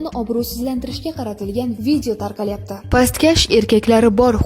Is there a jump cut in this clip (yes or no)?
yes